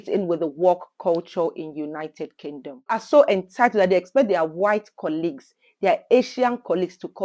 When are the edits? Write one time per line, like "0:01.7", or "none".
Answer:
0:03.0